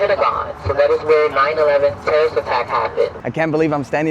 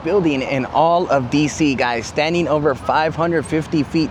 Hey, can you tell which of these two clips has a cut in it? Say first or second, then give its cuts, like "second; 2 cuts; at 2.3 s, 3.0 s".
first; 1 cut; at 3.2 s